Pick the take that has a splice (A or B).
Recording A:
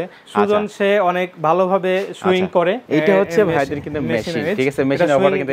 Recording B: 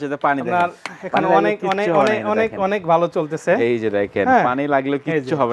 A